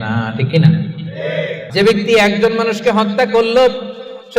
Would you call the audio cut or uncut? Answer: cut